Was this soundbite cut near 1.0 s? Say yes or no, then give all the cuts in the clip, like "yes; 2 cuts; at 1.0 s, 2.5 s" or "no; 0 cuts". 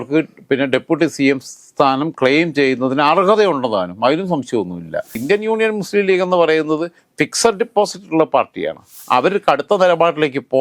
no; 2 cuts; at 5.2 s, 8.9 s